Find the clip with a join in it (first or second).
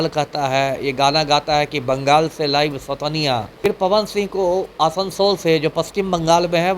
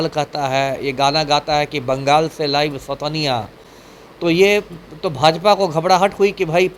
first